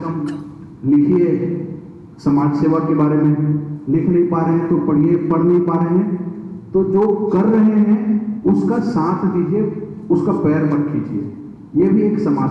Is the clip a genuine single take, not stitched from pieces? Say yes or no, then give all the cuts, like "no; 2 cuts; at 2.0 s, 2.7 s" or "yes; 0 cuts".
yes; 0 cuts